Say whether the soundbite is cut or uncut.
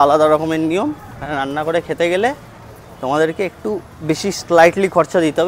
uncut